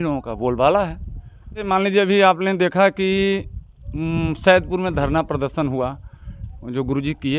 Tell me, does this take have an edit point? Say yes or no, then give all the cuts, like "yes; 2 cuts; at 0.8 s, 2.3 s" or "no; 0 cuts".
yes; 1 cut; at 1.7 s